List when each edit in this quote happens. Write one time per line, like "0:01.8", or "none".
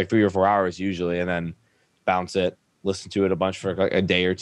0:01.9